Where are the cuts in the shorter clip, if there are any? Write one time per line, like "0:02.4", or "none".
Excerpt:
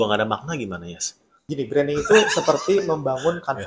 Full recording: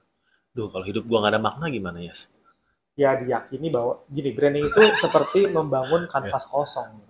0:01.4